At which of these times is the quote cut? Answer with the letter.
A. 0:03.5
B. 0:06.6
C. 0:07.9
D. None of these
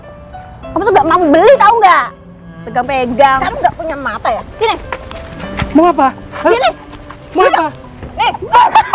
A